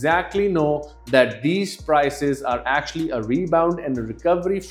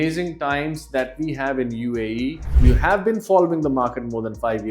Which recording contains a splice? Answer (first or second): second